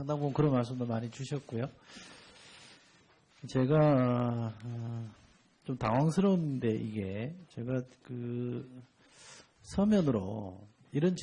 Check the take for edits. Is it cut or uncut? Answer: uncut